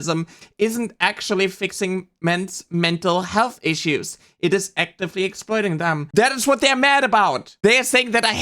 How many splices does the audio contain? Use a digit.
1